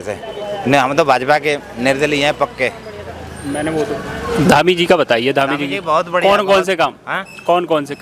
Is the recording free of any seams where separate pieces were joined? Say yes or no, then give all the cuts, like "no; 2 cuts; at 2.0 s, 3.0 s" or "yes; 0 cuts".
yes; 0 cuts